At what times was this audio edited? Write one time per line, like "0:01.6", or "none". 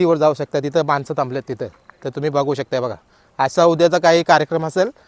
none